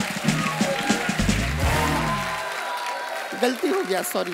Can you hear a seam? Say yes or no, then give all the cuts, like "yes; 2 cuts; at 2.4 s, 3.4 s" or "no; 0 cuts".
no; 0 cuts